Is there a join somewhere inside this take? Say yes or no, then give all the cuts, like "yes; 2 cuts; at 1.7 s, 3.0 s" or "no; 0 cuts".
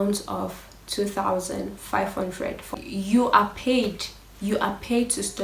yes; 1 cut; at 2.8 s